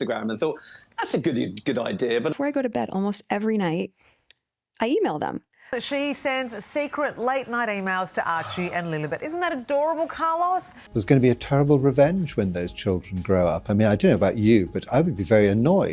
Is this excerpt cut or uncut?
cut